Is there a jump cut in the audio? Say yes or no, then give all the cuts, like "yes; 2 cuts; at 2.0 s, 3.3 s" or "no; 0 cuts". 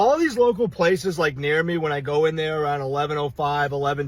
no; 0 cuts